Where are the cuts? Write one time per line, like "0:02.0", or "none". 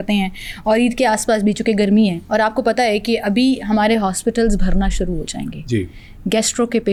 none